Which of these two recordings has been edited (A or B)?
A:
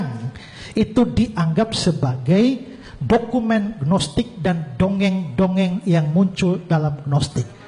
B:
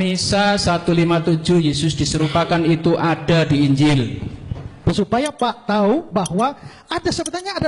B